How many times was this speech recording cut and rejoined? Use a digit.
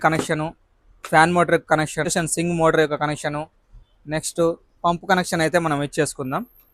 0